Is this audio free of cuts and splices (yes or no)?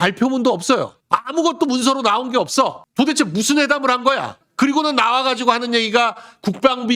yes